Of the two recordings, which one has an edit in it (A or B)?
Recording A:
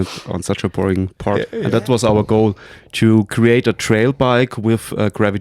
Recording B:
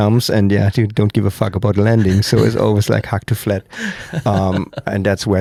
A